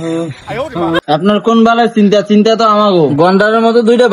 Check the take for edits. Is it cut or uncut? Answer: cut